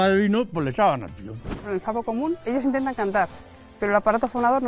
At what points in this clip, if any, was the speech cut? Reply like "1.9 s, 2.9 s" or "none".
1.6 s, 2.4 s

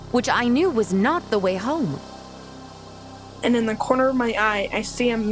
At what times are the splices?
2.7 s

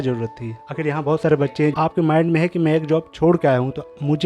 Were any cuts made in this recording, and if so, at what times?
1.7 s

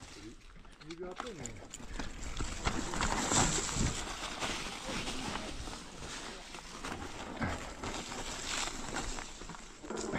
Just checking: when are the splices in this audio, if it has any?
none

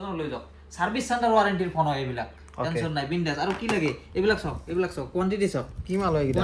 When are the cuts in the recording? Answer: none

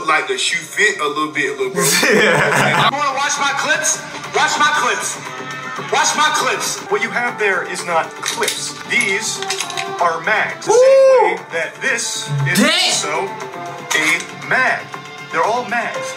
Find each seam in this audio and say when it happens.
2.9 s, 6.8 s, 8.7 s, 10.6 s

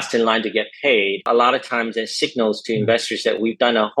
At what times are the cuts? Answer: 1.3 s

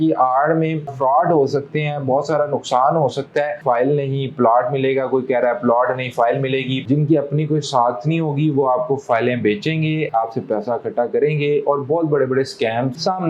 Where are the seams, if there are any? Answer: 0.9 s, 3.6 s, 6.8 s

